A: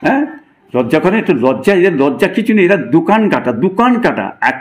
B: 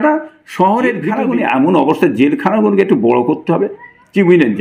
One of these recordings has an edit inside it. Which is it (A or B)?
B